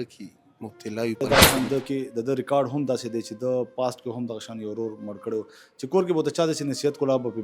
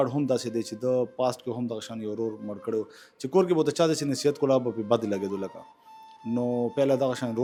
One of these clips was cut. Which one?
first; 1 cut; at 1.2 s

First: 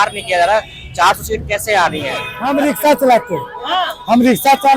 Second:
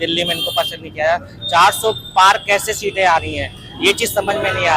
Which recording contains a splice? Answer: first; 1 cut; at 2.3 s

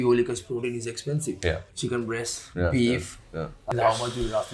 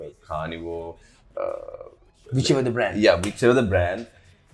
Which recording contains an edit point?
first; 1 cut; at 3.6 s

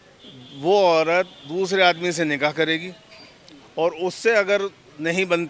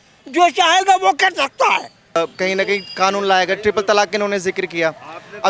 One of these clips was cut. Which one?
second; 1 cut; at 2.2 s

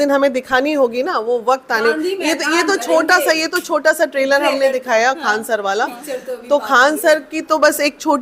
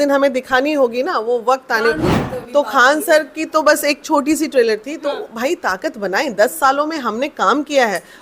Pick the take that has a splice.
second; 1 cut; at 2.1 s

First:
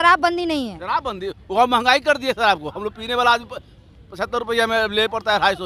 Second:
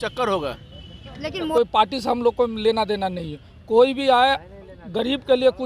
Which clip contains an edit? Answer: second; 1 cut; at 1.5 s

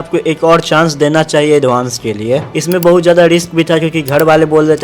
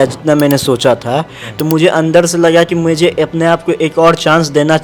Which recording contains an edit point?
first; 1 cut; at 2.5 s

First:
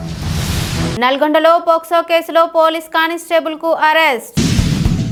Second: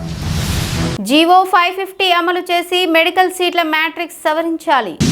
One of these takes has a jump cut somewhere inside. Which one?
second; 1 cut; at 0.9 s

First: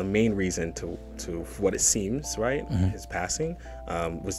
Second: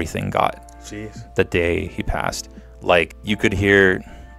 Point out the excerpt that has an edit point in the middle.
second; 1 cut; at 3.2 s

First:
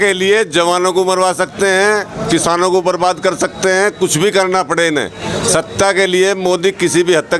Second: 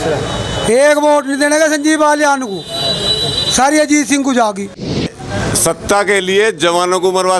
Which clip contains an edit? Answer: second; 1 cut; at 5.1 s

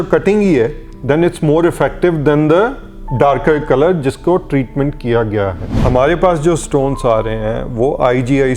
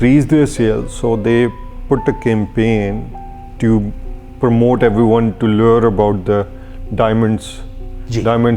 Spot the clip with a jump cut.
first; 1 cut; at 5.7 s

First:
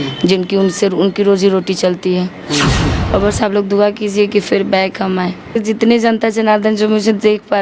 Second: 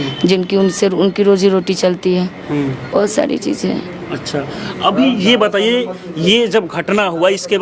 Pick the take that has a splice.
first; 2 cuts; at 2.9 s, 5.6 s

